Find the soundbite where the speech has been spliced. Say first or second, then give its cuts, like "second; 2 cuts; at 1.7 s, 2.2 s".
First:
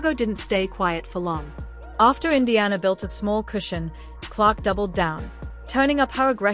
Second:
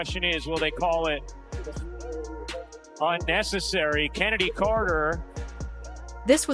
second; 1 cut; at 5.6 s